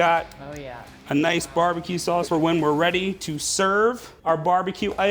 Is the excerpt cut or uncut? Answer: cut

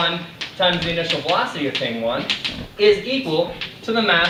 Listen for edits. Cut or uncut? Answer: uncut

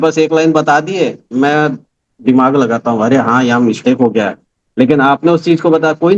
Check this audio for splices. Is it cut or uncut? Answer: uncut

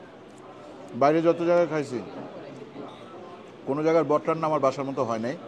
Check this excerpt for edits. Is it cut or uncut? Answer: uncut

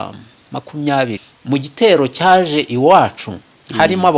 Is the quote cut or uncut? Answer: cut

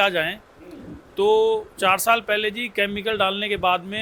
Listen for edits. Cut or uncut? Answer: uncut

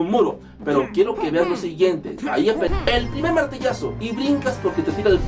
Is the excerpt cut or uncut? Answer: cut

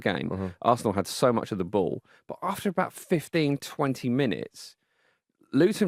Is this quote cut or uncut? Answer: uncut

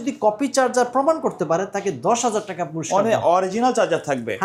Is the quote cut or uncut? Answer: uncut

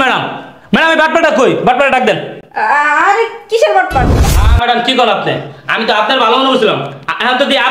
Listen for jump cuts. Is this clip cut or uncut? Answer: cut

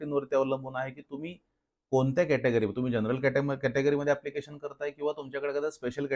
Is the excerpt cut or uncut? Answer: uncut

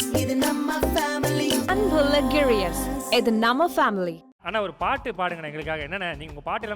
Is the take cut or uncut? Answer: cut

